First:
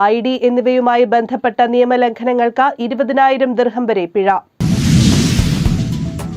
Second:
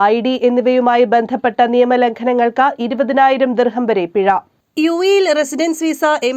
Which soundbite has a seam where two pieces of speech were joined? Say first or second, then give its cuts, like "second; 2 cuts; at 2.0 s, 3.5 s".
first; 1 cut; at 4.5 s